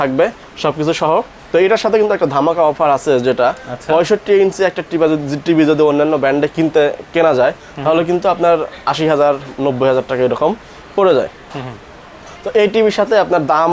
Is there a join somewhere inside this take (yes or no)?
no